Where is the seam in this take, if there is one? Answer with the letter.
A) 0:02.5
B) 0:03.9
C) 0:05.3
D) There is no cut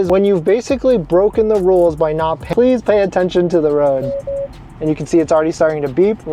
A